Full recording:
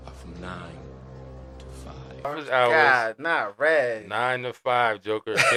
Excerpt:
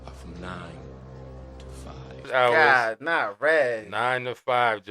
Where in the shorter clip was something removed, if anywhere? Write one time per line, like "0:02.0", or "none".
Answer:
0:02.2